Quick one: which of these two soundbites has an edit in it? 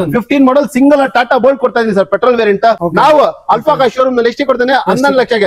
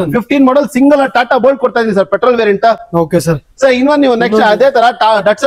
first; 1 cut; at 2.8 s

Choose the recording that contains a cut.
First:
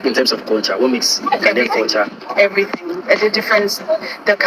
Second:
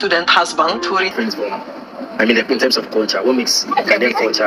second; 1 cut; at 1.1 s

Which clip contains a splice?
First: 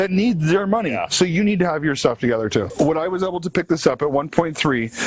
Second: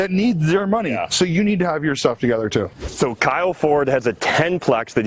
first; 1 cut; at 2.7 s

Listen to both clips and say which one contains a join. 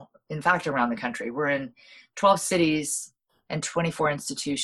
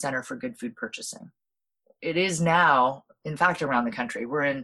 second; 1 cut; at 1.9 s

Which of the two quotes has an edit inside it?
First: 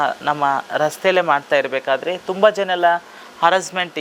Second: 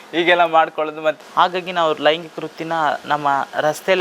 second; 1 cut; at 1.2 s

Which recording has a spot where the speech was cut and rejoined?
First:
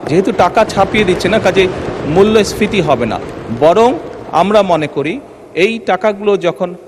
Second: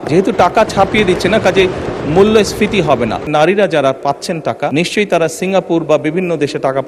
second; 2 cuts; at 3.3 s, 4.7 s

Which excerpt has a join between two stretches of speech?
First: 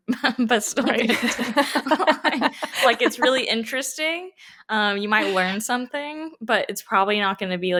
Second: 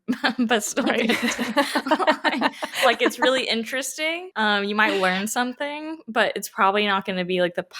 second; 1 cut; at 4.2 s

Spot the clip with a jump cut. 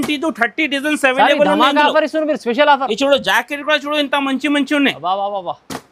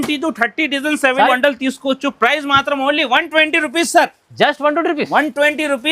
second; 1 cut; at 1.3 s

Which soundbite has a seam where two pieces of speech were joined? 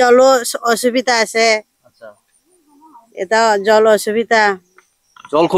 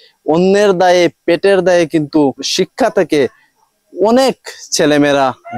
second; 1 cut; at 2.4 s

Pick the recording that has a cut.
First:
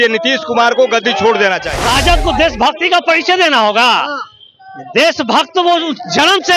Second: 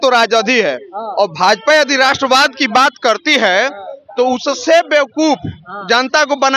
first; 1 cut; at 1.7 s

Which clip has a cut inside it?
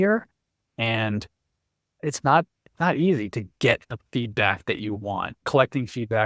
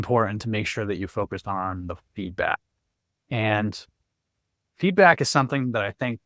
first; 2 cuts; at 2.0 s, 5.5 s

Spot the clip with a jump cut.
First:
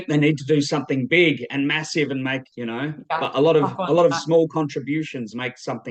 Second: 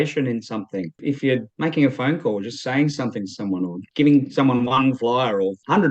second; 2 cuts; at 1.0 s, 3.8 s

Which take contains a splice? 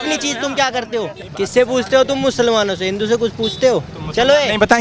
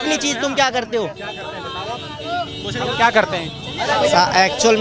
first; 1 cut; at 1.2 s

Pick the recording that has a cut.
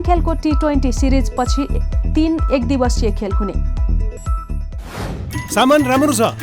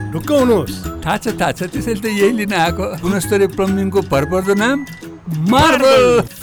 first; 1 cut; at 5.3 s

